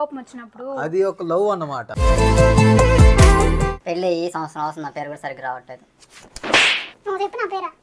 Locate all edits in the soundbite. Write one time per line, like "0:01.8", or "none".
0:03.7